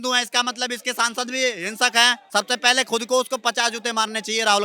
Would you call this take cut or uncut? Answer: cut